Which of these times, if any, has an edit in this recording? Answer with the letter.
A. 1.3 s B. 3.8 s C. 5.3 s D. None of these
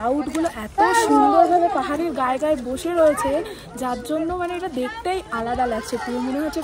D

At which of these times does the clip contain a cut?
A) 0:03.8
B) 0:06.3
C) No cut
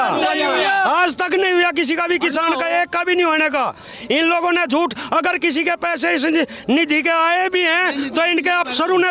C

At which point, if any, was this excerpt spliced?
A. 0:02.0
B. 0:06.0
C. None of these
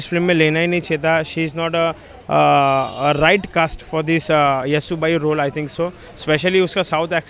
C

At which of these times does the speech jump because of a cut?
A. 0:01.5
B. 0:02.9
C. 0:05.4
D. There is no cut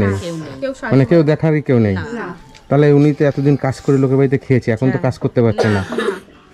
D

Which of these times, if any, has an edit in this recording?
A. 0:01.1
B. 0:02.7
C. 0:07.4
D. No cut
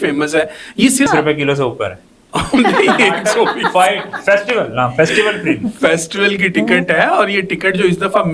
A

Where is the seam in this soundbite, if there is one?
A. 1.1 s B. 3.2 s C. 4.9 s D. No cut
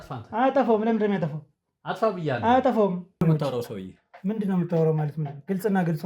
B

